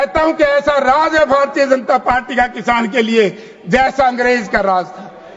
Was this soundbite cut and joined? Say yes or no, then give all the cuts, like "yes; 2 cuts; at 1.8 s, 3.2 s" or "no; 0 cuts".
no; 0 cuts